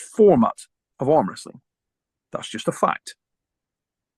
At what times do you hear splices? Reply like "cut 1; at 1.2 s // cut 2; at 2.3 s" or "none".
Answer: none